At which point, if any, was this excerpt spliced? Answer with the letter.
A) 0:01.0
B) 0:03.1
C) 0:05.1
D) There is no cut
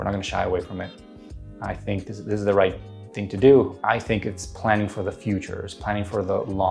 D